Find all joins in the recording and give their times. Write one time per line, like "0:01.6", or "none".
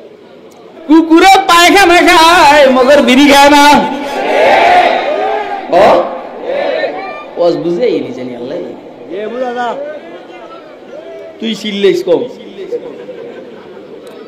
none